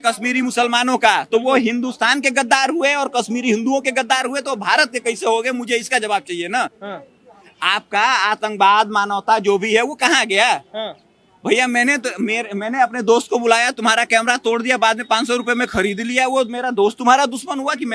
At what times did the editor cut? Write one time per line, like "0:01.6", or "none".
none